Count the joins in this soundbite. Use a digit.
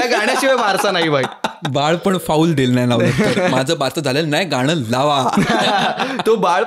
1